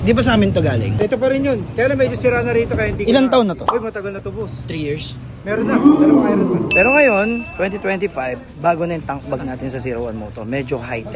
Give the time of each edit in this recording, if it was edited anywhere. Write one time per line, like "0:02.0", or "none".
0:00.9
0:03.6
0:05.6
0:06.7